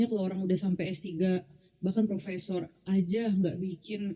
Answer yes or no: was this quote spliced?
no